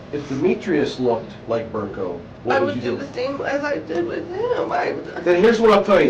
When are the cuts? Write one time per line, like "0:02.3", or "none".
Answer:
0:01.3
0:02.3